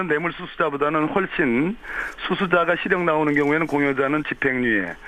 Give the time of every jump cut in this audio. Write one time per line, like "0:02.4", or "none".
none